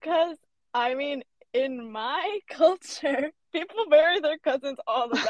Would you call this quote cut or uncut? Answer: uncut